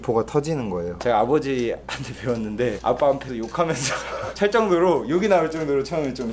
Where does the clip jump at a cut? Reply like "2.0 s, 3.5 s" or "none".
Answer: 1.0 s